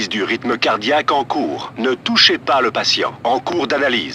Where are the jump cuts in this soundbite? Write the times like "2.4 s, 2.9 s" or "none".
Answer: 3.0 s